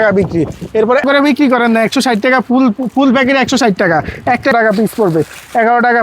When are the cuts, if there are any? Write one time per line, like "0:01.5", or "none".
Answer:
0:01.0
0:04.5